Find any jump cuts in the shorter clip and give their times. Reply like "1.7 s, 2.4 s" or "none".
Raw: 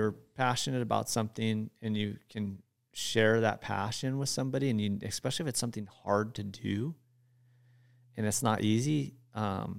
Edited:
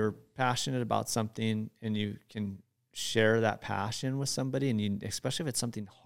none